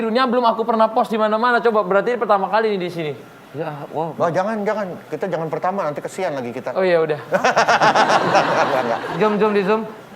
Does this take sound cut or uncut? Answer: cut